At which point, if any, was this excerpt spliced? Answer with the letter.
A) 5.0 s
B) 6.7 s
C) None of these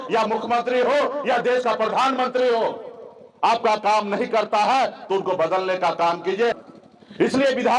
B